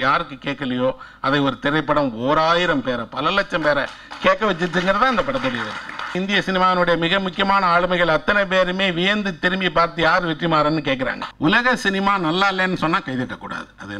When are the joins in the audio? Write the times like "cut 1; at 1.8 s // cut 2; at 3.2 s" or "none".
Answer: cut 1; at 6.1 s // cut 2; at 11.2 s